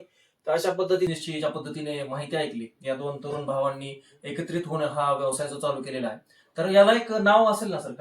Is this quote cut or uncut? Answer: cut